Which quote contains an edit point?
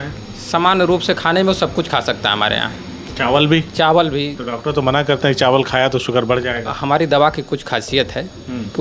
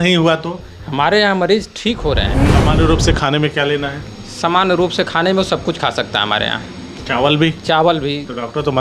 second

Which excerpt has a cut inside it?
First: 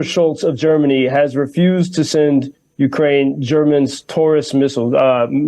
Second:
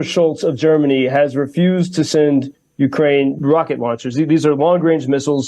second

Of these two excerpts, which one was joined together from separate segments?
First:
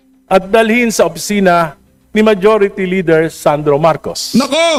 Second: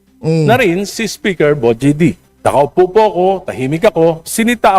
second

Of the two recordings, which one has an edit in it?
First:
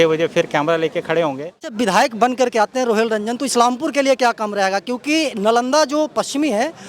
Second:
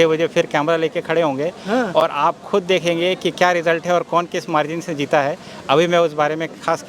first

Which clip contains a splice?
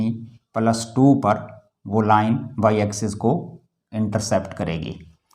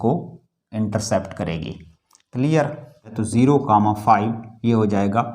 second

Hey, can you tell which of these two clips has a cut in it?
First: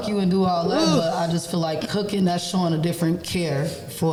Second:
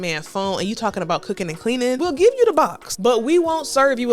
second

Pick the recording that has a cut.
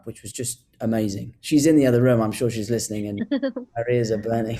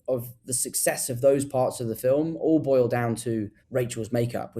second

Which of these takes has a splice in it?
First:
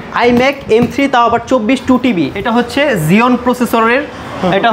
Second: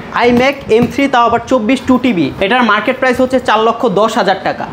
first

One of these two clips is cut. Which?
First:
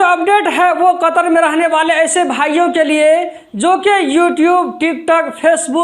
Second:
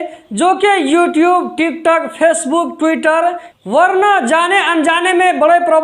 second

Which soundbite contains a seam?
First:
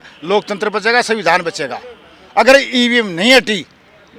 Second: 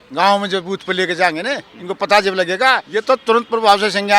second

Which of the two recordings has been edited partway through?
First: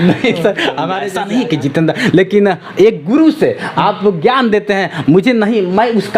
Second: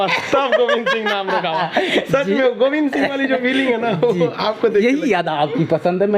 first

